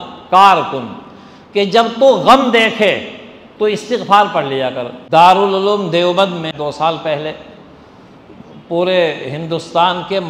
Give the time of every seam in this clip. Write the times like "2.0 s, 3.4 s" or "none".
4.9 s, 6.5 s